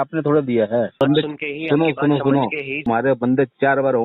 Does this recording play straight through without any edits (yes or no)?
no